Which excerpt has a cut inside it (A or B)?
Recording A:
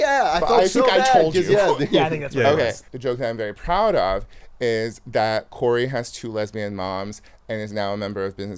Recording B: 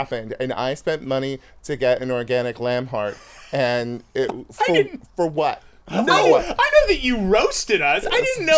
A